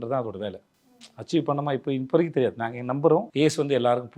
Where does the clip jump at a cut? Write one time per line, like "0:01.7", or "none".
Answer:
0:03.3